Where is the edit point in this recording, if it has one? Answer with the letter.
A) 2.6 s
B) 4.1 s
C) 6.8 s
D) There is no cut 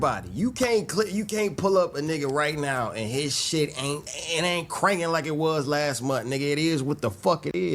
B